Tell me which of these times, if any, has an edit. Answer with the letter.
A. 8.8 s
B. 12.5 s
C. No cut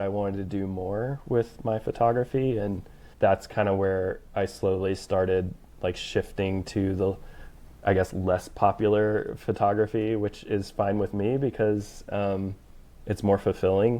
C